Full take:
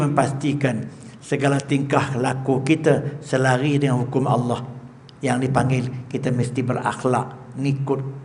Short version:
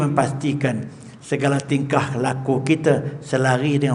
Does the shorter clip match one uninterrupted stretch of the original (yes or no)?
yes